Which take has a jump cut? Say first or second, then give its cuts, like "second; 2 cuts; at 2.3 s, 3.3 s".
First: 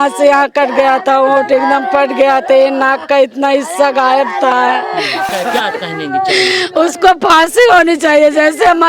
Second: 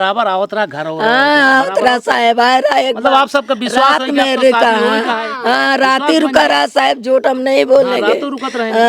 first; 1 cut; at 5.3 s